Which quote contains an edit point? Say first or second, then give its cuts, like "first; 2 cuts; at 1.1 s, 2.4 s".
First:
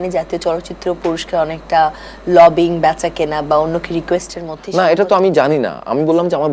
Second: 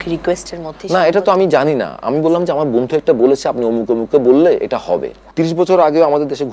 second; 1 cut; at 5.2 s